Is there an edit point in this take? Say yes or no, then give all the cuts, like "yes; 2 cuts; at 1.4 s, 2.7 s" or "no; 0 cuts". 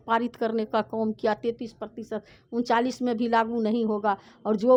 no; 0 cuts